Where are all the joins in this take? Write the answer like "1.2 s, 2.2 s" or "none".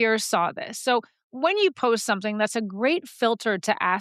none